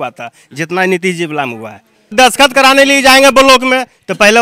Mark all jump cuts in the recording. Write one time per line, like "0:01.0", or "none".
0:02.0